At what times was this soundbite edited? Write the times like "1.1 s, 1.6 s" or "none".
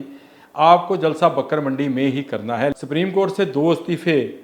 2.7 s